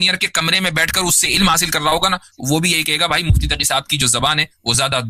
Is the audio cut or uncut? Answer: uncut